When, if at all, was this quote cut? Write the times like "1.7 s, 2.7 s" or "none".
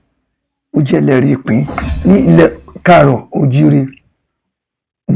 1.8 s